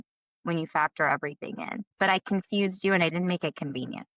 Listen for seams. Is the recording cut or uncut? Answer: cut